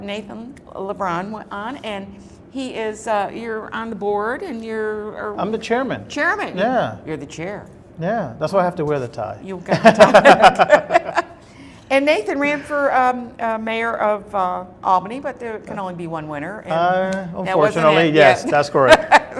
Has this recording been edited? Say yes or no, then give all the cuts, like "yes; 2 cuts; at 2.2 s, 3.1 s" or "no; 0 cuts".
yes; 1 cut; at 5.5 s